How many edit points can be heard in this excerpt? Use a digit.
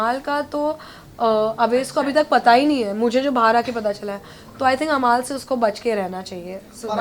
0